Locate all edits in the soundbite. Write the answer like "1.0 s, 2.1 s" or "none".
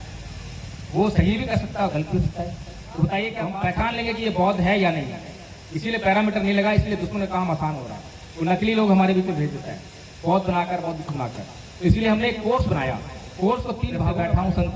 3.4 s, 14.0 s